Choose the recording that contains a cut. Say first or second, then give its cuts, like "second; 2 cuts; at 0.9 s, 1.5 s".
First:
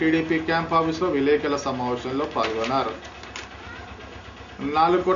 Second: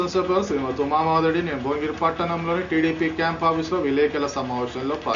first; 1 cut; at 3.4 s